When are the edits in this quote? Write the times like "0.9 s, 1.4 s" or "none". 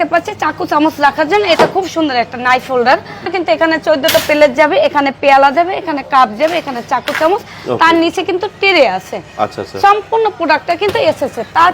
3.3 s